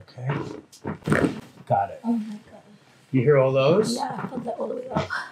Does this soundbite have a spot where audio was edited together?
no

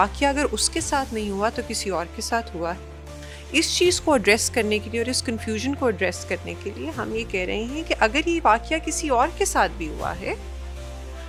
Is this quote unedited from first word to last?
yes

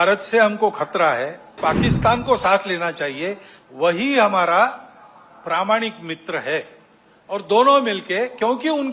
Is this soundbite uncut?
no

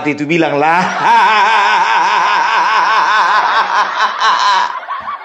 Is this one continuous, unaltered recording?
yes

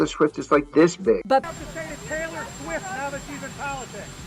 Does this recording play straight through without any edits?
no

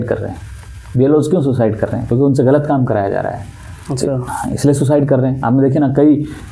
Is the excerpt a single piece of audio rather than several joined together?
yes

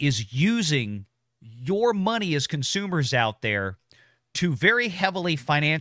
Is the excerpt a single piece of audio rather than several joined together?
yes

